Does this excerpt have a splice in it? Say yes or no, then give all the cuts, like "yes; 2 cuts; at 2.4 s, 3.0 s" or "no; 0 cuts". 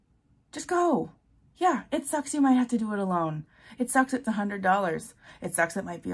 no; 0 cuts